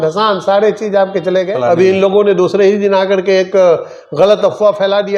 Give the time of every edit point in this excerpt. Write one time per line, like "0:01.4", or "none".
0:01.5

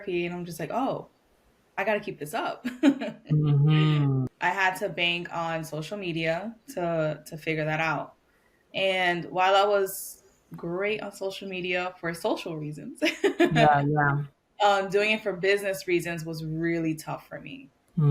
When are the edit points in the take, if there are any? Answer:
0:04.3

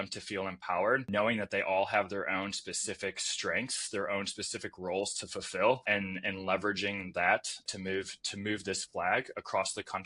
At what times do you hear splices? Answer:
0:01.1
0:05.8
0:07.6

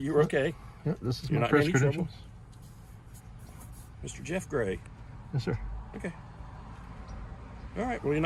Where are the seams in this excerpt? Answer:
none

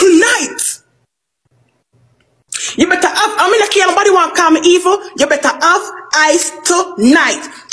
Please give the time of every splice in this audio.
none

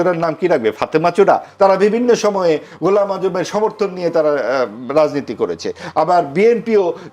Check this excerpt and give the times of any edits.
0:01.5

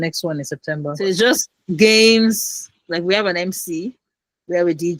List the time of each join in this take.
0:01.1

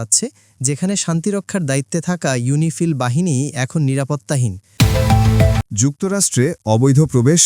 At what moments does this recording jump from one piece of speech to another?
0:04.6
0:05.6

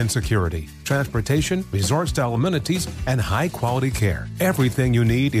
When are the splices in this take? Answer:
none

